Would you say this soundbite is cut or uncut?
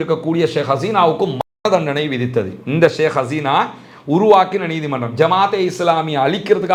uncut